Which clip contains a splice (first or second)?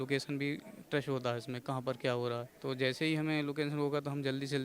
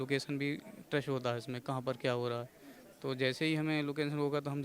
first